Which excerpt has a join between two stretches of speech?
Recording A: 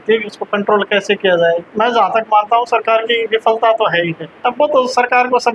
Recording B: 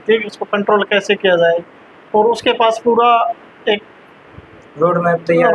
A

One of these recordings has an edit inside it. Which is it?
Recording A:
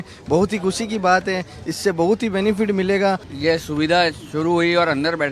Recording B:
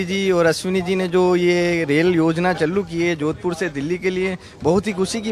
A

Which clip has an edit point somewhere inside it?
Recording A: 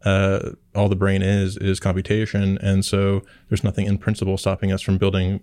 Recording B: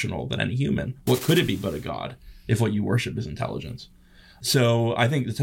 B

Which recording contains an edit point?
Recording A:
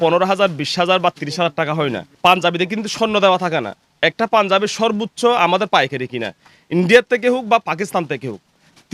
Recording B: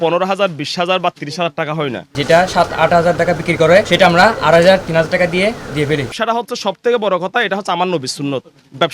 B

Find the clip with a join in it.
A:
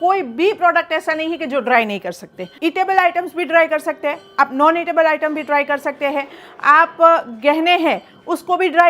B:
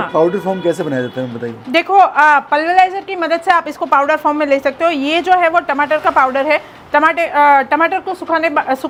A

